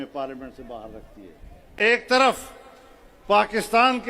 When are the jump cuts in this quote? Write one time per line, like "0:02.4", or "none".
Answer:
0:01.7